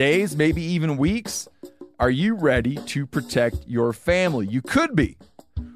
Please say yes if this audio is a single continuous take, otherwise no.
yes